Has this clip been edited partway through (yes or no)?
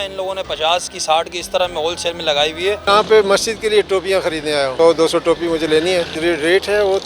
yes